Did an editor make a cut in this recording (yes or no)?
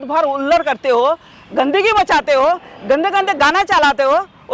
no